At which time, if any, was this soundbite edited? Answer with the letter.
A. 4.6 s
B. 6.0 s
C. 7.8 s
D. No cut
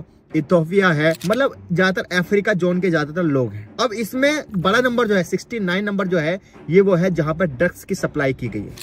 A